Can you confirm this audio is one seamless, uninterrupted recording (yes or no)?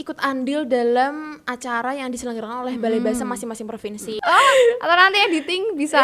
no